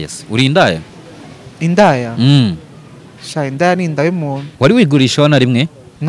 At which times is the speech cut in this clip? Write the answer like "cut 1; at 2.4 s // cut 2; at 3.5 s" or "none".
cut 1; at 4.5 s